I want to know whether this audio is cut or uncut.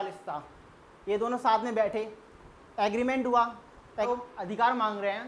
cut